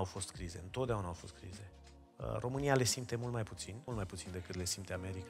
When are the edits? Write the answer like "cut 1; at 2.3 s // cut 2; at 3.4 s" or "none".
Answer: cut 1; at 3.7 s